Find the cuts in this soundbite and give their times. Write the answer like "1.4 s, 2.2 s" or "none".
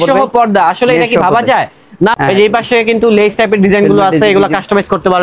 2.1 s